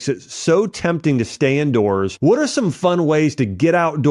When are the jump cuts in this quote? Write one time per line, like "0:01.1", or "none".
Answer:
0:02.1